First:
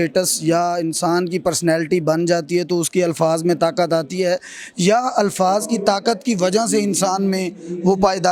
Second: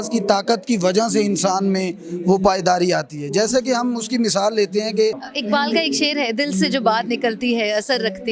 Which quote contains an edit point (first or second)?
second